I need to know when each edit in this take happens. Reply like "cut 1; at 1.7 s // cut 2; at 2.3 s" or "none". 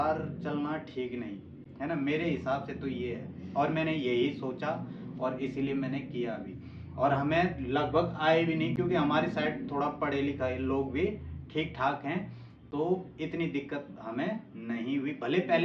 none